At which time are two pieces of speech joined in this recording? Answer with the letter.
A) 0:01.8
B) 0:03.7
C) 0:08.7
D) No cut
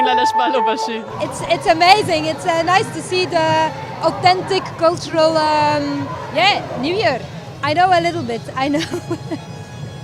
D